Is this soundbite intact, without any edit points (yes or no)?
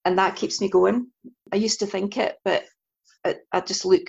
no